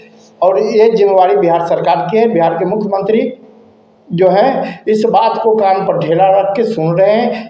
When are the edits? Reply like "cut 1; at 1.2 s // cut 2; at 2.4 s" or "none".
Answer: none